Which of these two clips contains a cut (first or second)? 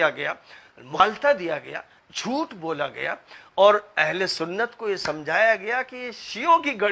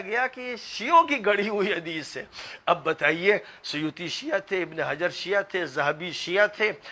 first